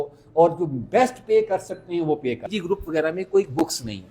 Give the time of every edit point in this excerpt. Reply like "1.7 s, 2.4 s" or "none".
2.4 s